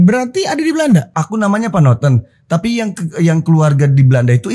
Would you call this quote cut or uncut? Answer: cut